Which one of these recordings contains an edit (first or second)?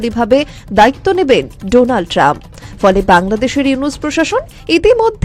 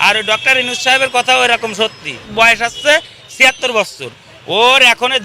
second